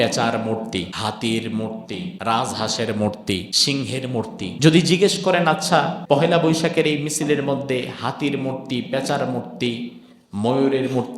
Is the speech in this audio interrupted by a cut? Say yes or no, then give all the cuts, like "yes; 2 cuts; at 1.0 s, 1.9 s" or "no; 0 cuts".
yes; 5 cuts; at 0.9 s, 2.1 s, 3.5 s, 4.5 s, 6.0 s